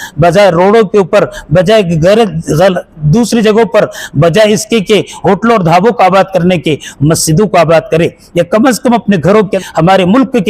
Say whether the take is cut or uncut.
cut